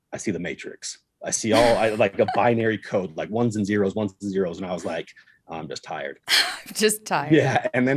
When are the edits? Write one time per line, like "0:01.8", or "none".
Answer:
0:06.5